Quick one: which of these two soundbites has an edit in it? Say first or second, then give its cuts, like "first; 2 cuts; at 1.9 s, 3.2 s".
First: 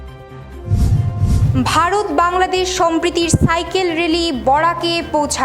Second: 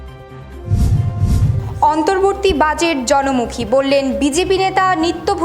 first; 1 cut; at 1.2 s